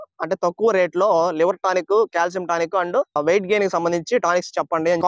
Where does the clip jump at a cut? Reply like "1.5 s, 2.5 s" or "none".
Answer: none